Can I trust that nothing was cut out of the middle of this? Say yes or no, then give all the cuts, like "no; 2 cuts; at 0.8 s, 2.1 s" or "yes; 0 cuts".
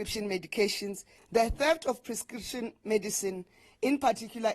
no; 1 cut; at 1.1 s